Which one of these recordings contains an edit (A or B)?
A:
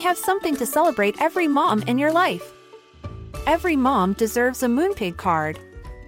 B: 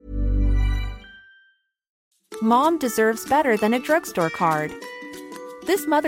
B